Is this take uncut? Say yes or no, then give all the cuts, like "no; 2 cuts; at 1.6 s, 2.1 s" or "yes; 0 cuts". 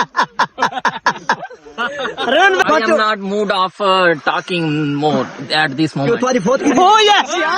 no; 1 cut; at 2.6 s